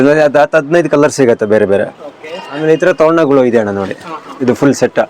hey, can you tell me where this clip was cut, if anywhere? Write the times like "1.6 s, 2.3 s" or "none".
2.8 s